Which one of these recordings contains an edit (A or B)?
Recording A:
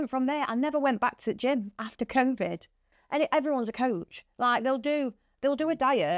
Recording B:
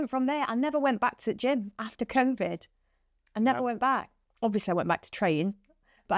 A